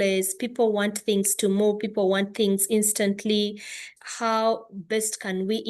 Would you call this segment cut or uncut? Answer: uncut